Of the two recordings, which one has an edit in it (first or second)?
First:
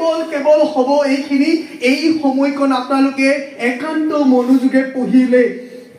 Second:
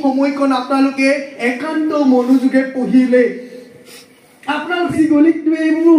second